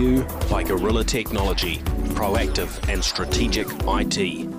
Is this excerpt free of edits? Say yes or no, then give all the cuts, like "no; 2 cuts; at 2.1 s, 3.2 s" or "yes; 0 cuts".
yes; 0 cuts